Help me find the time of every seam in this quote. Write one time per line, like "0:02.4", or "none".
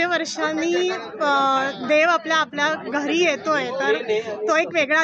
none